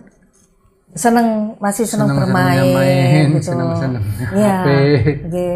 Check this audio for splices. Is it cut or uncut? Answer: uncut